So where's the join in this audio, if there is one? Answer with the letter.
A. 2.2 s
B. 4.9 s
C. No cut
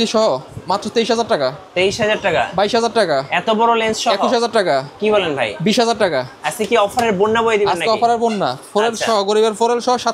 C